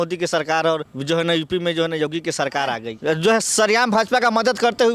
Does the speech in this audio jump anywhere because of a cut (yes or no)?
yes